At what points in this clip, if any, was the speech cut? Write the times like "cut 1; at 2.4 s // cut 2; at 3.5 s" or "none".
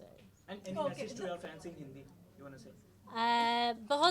none